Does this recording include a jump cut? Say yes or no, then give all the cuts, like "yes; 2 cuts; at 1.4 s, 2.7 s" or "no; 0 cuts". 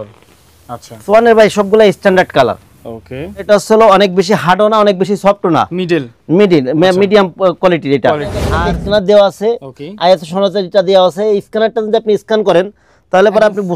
yes; 2 cuts; at 3.4 s, 8.5 s